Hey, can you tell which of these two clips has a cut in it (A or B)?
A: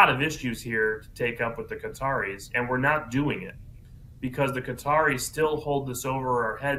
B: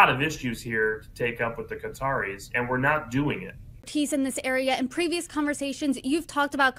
A